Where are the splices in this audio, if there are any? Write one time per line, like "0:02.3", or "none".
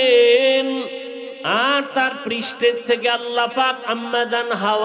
0:01.3